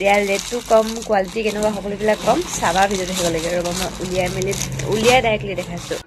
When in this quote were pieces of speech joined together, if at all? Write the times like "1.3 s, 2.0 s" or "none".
none